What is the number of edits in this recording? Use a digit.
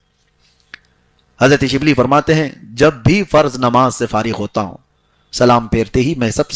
0